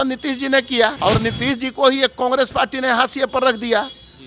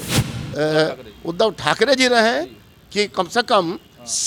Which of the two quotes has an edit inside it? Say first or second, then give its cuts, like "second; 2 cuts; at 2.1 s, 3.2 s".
first; 1 cut; at 1.0 s